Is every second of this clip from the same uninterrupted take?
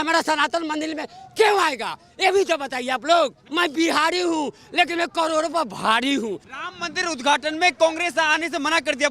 no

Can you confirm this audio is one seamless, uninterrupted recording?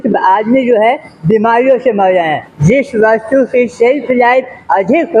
no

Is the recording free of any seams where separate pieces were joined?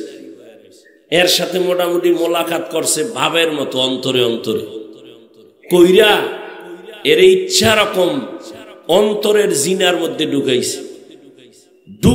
yes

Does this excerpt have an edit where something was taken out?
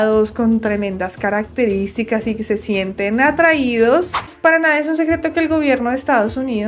yes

